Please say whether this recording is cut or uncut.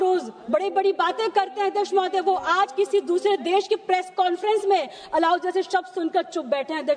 uncut